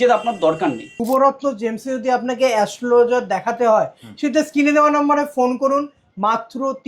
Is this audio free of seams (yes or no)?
no